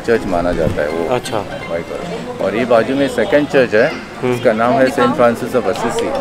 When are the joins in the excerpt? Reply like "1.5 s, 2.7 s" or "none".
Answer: none